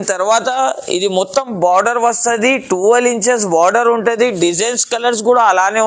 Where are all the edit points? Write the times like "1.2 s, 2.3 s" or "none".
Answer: none